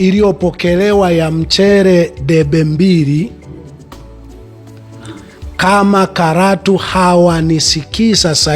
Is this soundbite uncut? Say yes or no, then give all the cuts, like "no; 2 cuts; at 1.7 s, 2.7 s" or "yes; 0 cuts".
no; 2 cuts; at 3.3 s, 4.8 s